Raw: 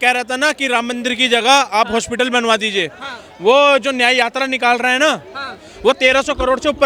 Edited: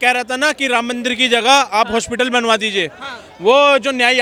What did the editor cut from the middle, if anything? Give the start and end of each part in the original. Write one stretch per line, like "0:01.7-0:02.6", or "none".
none